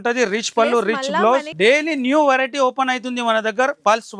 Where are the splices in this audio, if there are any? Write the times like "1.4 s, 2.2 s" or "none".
1.5 s